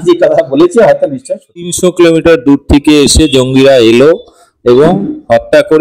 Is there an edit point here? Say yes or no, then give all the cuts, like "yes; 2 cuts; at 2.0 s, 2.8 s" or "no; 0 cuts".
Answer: yes; 1 cut; at 1.7 s